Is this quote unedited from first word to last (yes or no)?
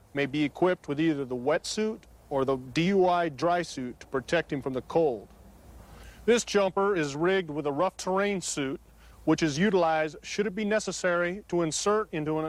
yes